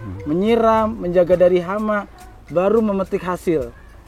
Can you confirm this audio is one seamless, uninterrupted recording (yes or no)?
yes